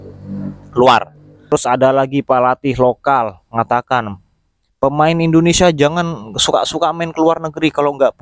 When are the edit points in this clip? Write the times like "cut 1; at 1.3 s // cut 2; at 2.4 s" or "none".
cut 1; at 1.5 s